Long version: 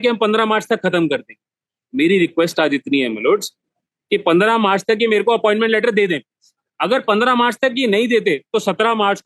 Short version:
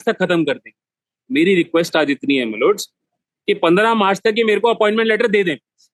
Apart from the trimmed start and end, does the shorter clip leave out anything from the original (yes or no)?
no